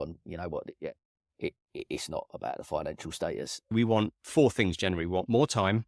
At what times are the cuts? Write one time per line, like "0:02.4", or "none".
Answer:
0:03.7